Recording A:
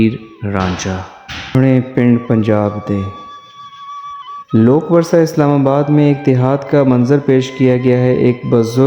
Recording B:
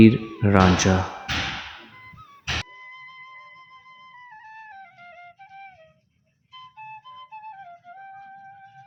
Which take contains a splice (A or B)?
A